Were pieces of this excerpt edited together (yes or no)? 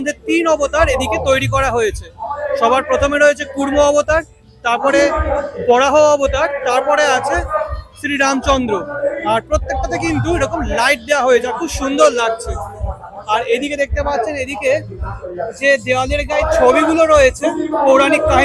no